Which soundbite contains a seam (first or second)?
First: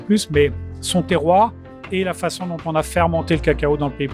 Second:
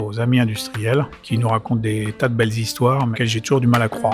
second